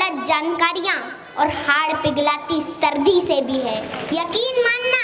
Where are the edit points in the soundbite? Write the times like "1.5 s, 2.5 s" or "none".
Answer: 3.9 s